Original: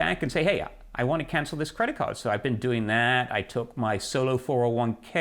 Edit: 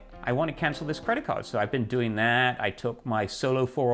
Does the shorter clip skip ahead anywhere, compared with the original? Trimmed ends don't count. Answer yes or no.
no